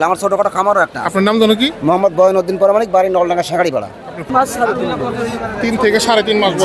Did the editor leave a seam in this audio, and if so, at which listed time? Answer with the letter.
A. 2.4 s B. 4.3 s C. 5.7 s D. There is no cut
B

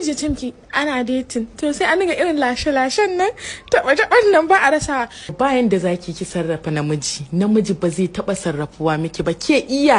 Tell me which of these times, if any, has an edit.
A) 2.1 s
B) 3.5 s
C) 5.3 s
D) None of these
C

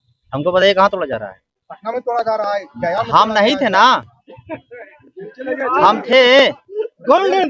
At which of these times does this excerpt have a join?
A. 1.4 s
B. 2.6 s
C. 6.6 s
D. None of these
D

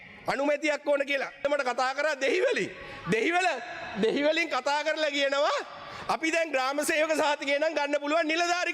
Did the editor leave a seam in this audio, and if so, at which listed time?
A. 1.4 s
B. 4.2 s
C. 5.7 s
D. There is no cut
A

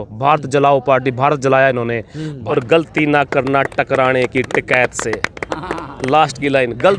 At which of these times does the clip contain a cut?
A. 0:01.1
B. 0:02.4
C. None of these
B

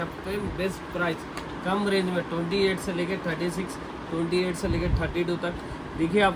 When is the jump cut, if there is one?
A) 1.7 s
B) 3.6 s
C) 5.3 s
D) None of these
D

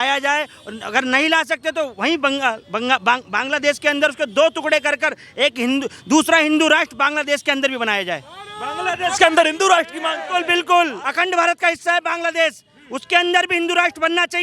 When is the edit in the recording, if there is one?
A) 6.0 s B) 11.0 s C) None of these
B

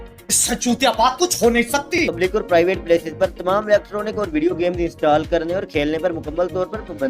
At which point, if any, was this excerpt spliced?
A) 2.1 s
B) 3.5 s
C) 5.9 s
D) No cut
A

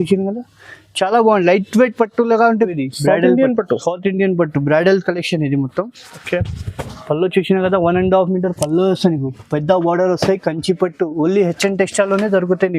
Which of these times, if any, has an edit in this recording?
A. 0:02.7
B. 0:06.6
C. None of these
A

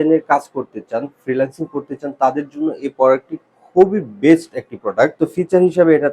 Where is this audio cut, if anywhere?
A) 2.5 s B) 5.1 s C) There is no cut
B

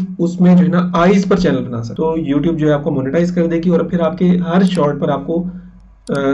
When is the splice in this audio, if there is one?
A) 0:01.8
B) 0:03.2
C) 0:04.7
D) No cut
A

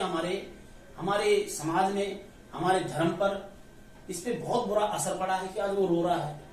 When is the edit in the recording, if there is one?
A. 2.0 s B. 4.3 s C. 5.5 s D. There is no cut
C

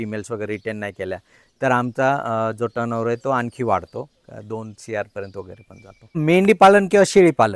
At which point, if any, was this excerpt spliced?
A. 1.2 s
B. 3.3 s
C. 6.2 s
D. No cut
C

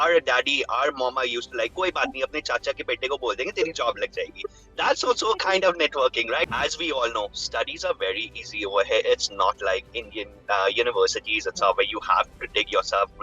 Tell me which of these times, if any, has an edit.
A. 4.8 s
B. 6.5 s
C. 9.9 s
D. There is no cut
B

